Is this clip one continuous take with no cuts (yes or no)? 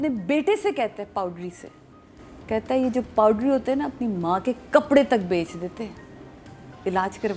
yes